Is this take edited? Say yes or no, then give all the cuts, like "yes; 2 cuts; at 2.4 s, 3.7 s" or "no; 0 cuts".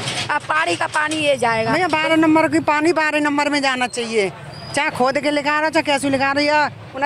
yes; 1 cut; at 1.7 s